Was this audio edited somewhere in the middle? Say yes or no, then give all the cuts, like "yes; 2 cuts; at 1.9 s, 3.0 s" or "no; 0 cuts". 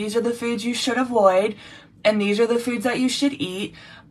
no; 0 cuts